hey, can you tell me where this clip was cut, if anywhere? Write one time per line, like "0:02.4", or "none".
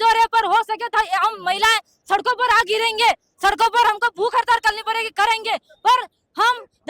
0:03.0